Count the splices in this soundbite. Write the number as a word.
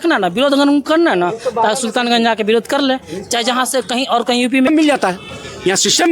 one